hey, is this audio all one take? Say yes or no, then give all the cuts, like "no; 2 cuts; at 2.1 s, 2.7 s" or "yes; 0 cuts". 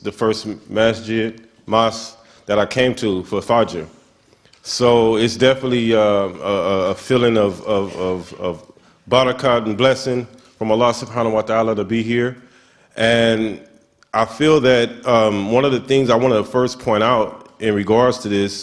no; 1 cut; at 10.0 s